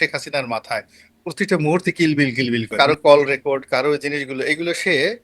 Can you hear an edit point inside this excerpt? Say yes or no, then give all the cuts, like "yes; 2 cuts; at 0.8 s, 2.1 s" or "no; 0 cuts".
yes; 1 cut; at 2.7 s